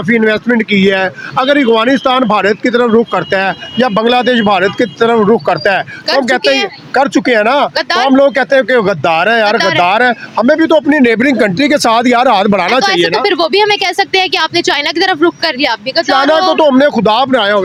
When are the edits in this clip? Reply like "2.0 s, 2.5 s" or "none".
none